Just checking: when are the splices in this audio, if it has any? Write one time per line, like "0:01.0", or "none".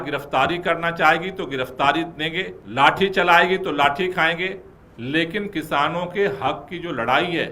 0:02.6